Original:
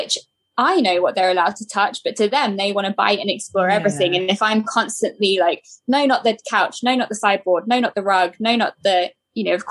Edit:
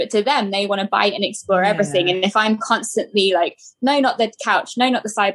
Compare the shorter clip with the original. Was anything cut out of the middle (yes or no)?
no